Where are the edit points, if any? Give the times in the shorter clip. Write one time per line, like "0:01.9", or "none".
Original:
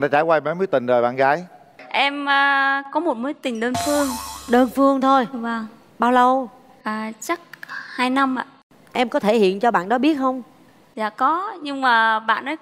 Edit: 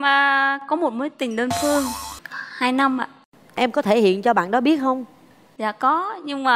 0:02.1